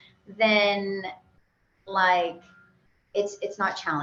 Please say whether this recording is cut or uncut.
uncut